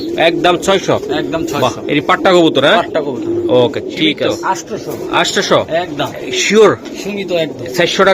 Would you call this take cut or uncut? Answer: cut